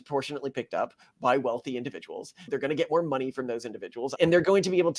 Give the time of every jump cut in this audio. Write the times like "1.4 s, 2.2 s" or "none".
2.4 s, 4.1 s